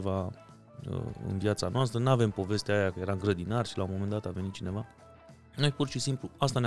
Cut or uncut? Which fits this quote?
uncut